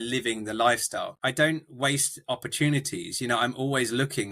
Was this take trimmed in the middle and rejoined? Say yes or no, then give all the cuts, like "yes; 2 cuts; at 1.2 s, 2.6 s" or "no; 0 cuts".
yes; 1 cut; at 1.1 s